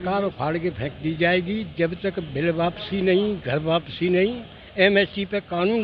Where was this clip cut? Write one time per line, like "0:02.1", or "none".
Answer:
none